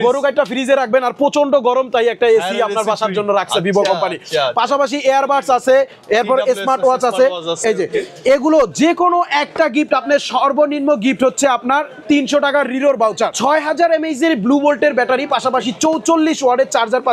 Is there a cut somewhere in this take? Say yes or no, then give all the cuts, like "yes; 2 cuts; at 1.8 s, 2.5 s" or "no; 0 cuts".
yes; 1 cut; at 13.4 s